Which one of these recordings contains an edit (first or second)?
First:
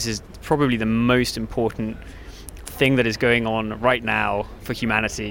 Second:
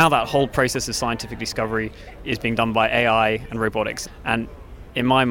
second